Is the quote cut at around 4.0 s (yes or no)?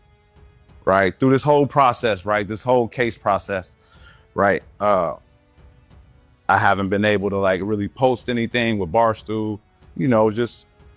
no